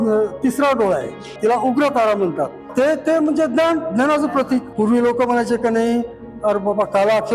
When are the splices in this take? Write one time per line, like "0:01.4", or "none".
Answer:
0:01.3
0:02.6
0:04.7